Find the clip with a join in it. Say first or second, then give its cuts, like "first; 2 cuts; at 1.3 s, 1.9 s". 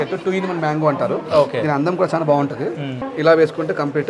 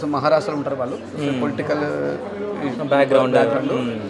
first; 1 cut; at 3.0 s